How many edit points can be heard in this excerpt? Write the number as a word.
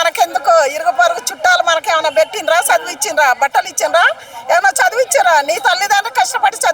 zero